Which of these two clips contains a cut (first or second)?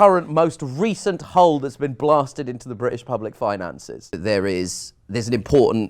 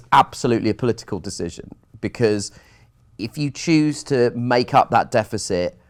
first